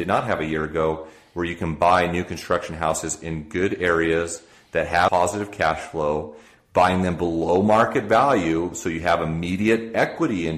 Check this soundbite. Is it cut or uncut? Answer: uncut